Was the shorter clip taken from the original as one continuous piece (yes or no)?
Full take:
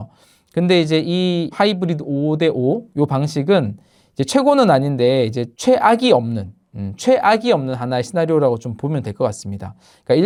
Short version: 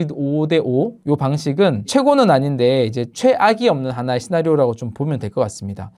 no